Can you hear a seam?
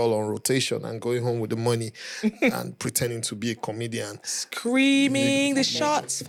no; 0 cuts

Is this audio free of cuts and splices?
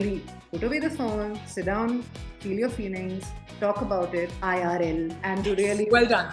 no; 2 cuts; at 4.4 s, 5.2 s

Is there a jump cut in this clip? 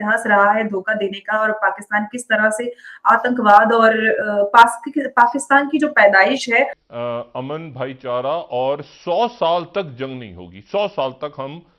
yes; 1 cut; at 6.8 s

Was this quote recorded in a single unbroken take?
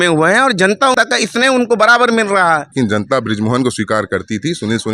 no; 2 cuts; at 0.9 s, 2.7 s

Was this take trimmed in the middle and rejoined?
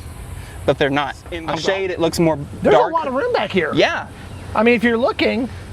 yes; 1 cut; at 1.5 s

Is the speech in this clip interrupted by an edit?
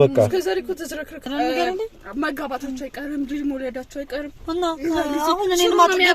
yes; 1 cut; at 1.3 s

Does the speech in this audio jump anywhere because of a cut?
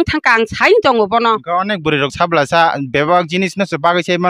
yes; 1 cut; at 1.6 s

